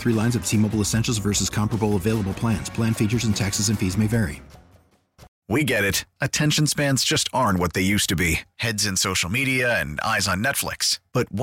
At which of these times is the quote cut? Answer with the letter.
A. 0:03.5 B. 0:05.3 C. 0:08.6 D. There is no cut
B